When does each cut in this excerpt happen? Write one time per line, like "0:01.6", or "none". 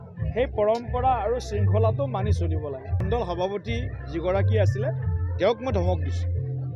0:03.0